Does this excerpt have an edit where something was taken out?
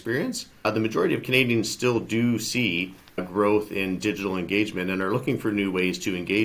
no; 0 cuts

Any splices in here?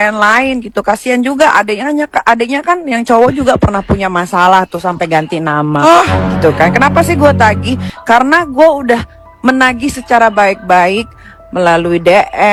no; 0 cuts

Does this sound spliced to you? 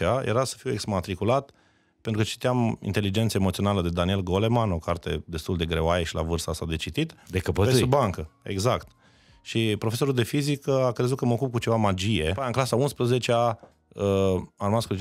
yes; 1 cut; at 12.4 s

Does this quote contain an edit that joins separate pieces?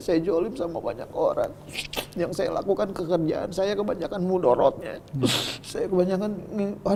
no; 0 cuts

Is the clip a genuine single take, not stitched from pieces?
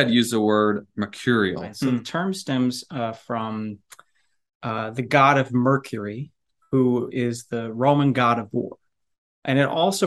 no; 1 cut; at 2.0 s

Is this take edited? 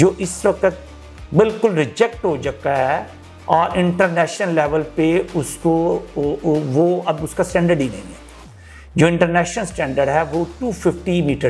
no; 0 cuts

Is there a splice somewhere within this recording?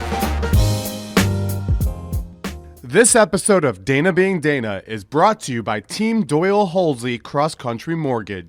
no; 0 cuts

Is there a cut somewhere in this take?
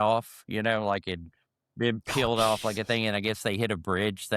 no; 0 cuts

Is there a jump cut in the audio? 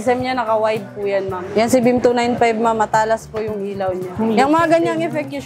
yes; 2 cuts; at 1.5 s, 4.1 s

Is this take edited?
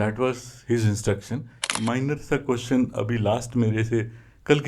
yes; 1 cut; at 1.7 s

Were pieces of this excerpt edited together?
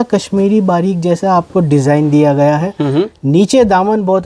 no; 0 cuts

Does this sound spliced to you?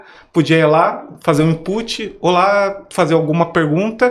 no; 0 cuts

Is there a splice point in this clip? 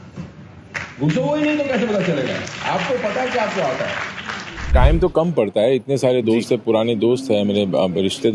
yes; 1 cut; at 4.7 s

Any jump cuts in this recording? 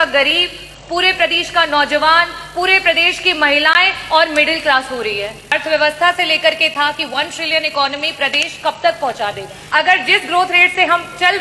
yes; 2 cuts; at 5.5 s, 9.5 s

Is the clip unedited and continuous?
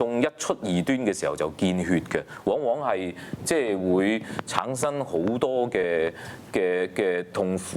yes; 0 cuts

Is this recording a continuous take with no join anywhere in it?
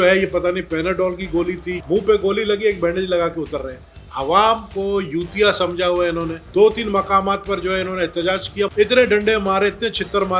no; 3 cuts; at 1.8 s, 6.4 s, 8.7 s

